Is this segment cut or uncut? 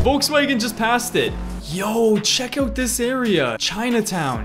cut